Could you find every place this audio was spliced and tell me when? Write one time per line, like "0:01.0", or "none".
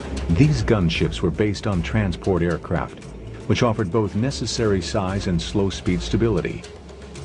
0:06.0